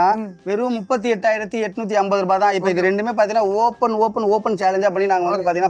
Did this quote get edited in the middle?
no; 0 cuts

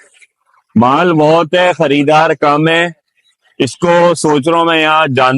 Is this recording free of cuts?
yes; 0 cuts

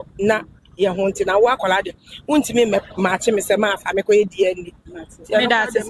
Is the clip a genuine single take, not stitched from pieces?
yes; 0 cuts

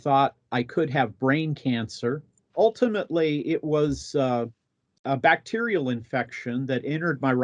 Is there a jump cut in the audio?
yes; 1 cut; at 2.4 s

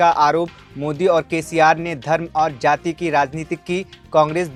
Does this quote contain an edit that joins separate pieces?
no; 0 cuts

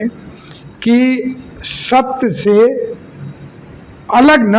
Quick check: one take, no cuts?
yes; 0 cuts

